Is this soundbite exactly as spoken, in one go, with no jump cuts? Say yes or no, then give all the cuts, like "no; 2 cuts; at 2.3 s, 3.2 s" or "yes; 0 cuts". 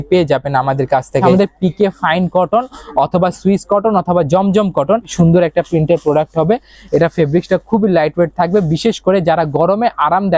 no; 2 cuts; at 1.3 s, 5.1 s